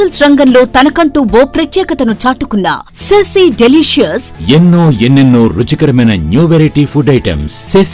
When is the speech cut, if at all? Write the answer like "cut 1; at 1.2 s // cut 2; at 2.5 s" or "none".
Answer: cut 1; at 4.3 s